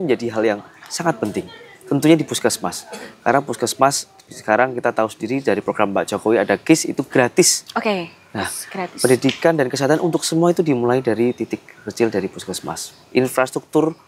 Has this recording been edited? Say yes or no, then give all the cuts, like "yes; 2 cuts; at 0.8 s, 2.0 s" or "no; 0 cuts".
no; 0 cuts